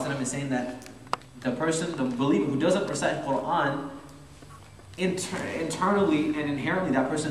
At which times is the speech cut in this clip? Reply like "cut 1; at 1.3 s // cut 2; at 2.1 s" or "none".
none